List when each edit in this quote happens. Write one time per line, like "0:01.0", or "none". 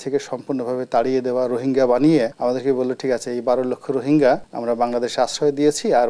0:02.3
0:04.5